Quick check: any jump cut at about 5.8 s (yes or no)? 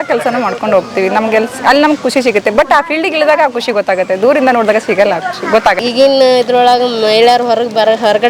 yes